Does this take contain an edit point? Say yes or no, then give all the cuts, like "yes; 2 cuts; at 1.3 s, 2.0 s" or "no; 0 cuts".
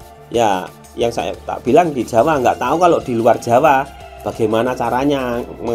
no; 0 cuts